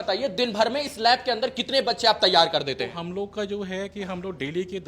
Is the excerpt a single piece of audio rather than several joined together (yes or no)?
yes